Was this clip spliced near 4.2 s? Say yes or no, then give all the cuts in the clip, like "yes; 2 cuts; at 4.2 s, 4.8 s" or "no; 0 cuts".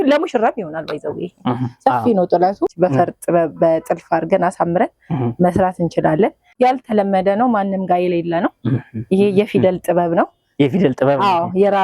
no; 2 cuts; at 2.7 s, 6.5 s